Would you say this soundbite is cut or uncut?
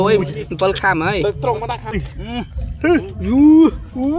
cut